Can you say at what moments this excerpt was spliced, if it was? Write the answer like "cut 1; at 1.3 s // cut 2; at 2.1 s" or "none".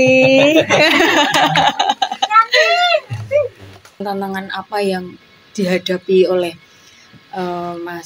cut 1; at 4.0 s